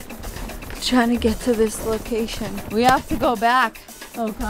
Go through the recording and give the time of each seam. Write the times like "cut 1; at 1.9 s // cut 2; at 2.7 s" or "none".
cut 1; at 2.6 s

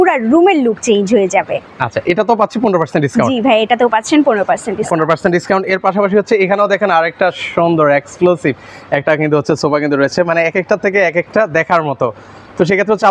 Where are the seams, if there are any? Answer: none

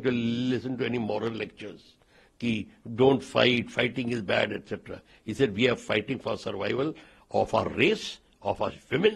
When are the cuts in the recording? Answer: none

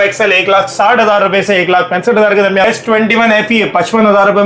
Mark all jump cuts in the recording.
cut 1; at 2.7 s

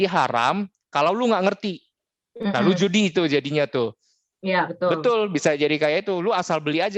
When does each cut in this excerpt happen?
none

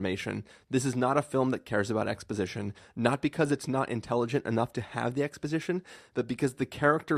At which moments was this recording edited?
none

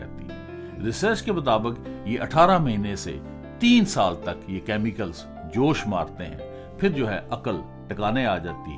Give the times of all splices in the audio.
none

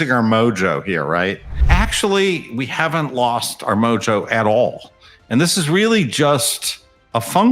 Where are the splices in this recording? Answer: cut 1; at 1.5 s

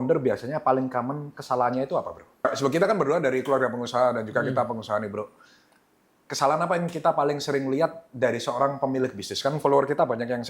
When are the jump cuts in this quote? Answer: cut 1; at 2.4 s

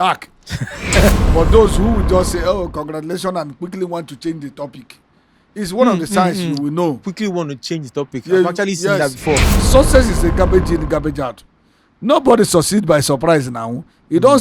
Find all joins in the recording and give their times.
cut 1; at 1.1 s // cut 2; at 9.6 s

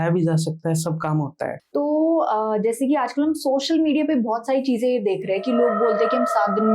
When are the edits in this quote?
cut 1; at 1.6 s

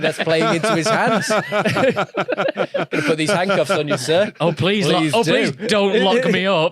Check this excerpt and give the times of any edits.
none

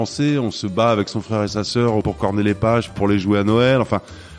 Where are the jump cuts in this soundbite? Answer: cut 1; at 2.0 s // cut 2; at 3.0 s

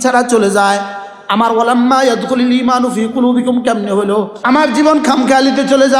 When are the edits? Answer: cut 1; at 4.3 s

